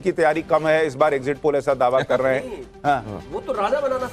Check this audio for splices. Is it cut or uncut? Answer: uncut